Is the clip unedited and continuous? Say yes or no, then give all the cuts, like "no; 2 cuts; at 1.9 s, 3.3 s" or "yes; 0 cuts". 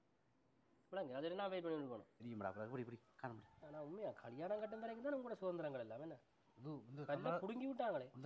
no; 1 cut; at 2.2 s